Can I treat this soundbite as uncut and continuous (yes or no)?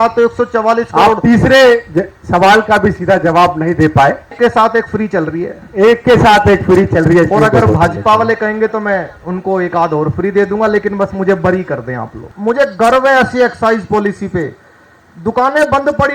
no